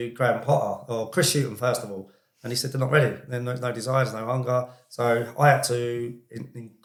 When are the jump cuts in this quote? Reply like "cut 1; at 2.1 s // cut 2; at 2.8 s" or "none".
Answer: none